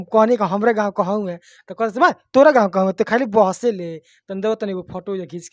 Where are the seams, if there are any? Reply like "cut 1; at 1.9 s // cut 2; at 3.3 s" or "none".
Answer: none